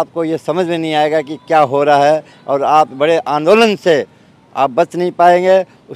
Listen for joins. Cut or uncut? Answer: uncut